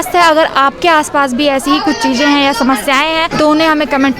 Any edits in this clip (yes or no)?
no